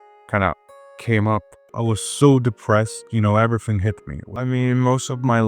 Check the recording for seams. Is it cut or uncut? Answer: cut